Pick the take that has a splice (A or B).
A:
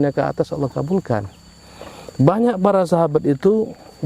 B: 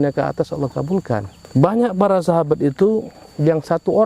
B